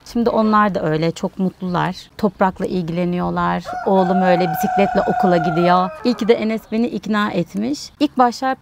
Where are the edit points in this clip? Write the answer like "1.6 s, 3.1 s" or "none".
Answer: none